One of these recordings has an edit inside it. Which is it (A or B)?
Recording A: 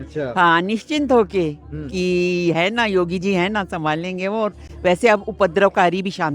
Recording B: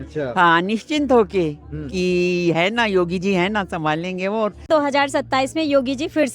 B